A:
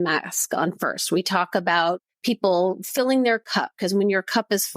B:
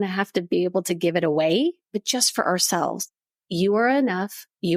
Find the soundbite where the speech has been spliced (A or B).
A